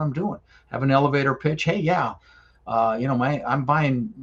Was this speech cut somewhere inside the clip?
no; 0 cuts

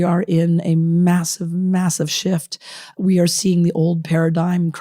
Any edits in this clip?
yes; 1 cut; at 2.9 s

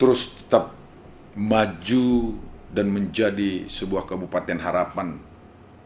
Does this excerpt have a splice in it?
no; 0 cuts

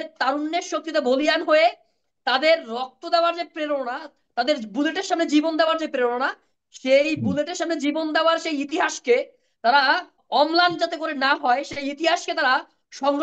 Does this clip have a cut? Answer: yes; 1 cut; at 10.2 s

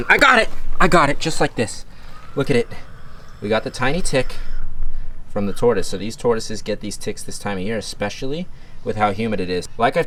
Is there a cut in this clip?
no; 0 cuts

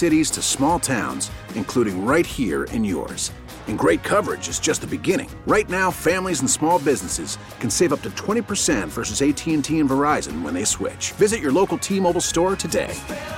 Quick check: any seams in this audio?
no; 0 cuts

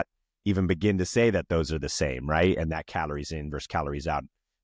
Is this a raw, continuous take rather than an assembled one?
yes; 0 cuts

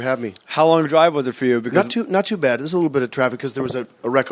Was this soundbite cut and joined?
yes; 1 cut; at 2.8 s

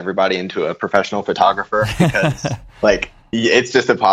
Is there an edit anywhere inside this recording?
no; 0 cuts

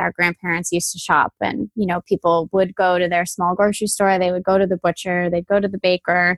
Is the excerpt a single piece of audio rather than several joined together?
yes; 0 cuts

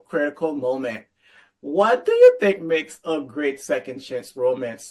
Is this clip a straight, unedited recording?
yes; 0 cuts

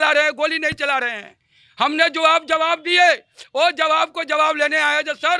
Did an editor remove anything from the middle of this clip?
no; 0 cuts

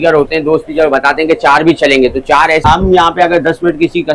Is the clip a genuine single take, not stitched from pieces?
no; 1 cut; at 2.6 s

